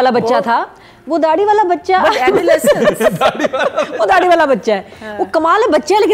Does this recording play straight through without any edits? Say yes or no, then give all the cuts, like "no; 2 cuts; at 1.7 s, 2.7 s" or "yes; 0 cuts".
yes; 0 cuts